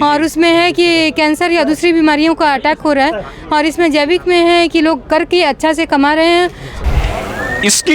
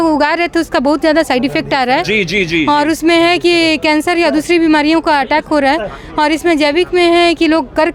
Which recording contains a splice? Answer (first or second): first